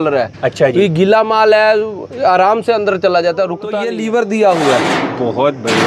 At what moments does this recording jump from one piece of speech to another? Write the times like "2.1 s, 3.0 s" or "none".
3.8 s